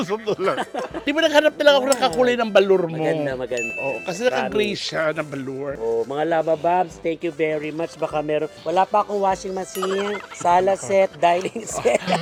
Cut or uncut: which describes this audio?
uncut